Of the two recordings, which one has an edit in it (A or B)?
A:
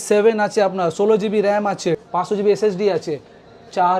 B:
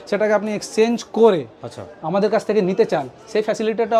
A